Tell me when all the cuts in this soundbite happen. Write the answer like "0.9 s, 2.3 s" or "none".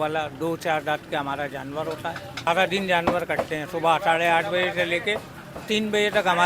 2.5 s